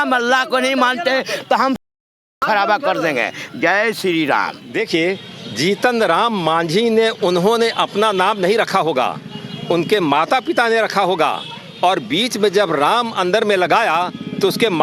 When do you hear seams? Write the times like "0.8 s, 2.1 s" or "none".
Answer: 4.6 s